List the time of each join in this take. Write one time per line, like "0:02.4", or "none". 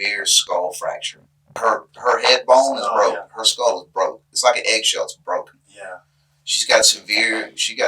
0:01.4